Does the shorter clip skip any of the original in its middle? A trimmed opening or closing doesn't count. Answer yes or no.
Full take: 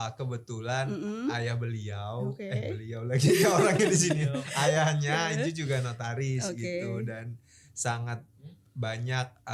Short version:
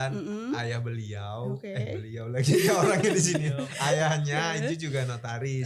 no